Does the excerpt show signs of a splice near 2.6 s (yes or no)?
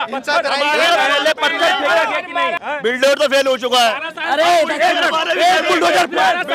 yes